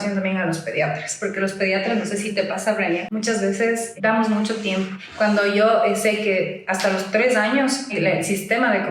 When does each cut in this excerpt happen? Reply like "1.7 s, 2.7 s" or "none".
3.1 s, 3.9 s, 5.0 s, 7.9 s